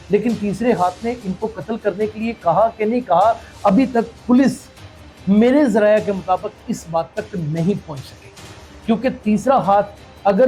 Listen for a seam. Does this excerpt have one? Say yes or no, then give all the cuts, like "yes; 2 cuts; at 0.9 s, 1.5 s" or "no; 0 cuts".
no; 0 cuts